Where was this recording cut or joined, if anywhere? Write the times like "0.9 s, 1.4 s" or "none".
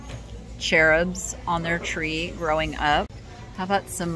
3.2 s